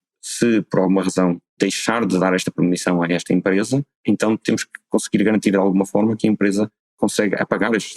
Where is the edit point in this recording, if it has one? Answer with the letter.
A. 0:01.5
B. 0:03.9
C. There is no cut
A